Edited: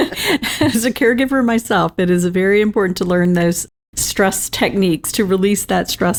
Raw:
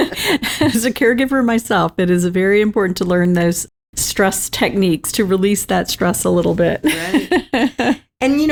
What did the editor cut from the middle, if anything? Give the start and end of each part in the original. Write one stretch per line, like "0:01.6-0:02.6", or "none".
none